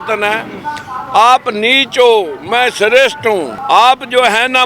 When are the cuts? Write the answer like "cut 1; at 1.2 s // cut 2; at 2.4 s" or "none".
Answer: cut 1; at 2.4 s // cut 2; at 3.5 s